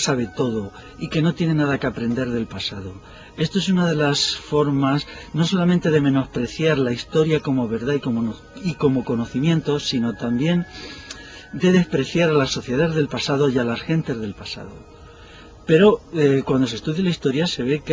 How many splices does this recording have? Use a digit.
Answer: 1